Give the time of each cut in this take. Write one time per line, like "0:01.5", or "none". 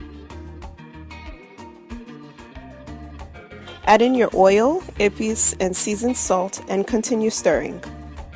0:03.8